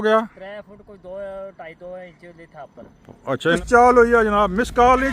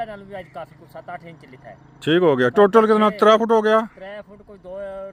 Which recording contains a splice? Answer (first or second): first